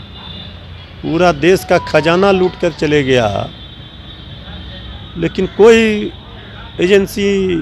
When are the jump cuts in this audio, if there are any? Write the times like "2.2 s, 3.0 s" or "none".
none